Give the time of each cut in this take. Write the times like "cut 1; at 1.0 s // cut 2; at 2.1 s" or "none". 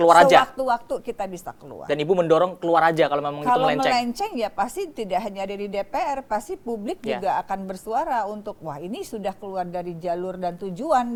none